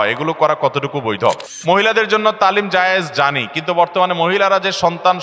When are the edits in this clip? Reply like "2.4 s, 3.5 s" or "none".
1.5 s